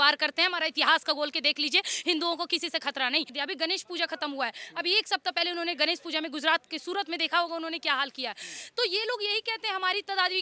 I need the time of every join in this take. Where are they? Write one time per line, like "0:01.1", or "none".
0:03.3

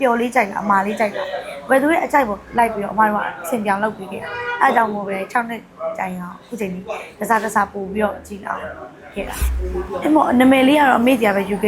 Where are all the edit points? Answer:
0:09.4

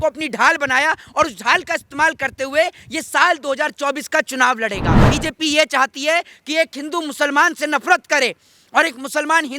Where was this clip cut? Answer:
0:05.1

